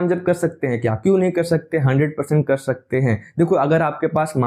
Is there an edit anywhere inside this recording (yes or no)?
no